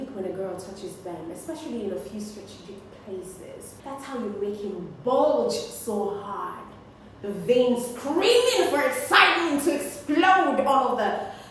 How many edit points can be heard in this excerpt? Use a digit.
1